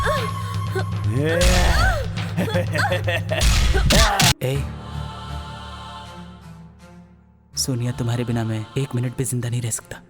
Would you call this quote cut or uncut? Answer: cut